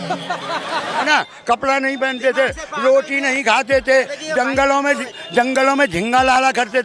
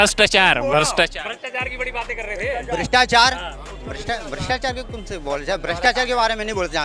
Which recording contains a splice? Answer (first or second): first